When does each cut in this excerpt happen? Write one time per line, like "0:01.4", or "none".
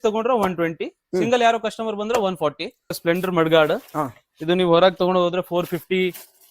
0:03.0

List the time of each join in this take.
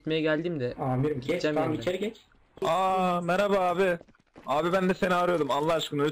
0:02.6

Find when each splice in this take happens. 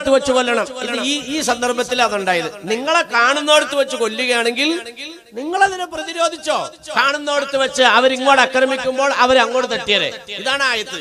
none

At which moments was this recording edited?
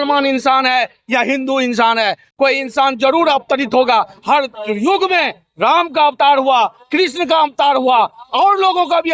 none

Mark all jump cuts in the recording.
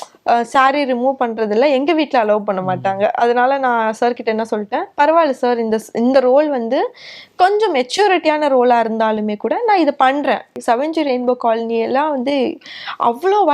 0:10.5

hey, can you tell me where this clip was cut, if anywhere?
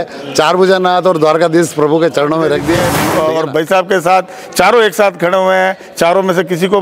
0:03.1

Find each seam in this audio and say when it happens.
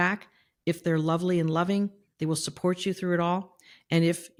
none

